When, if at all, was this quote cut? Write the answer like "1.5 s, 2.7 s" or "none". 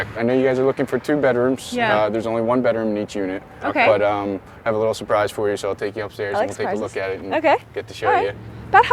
none